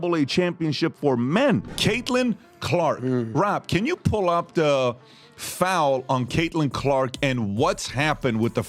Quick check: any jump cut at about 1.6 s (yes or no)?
yes